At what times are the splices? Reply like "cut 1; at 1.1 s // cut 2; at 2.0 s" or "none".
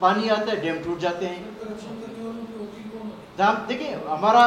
none